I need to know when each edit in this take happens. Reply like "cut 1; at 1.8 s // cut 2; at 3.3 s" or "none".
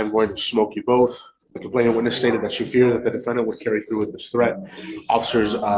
none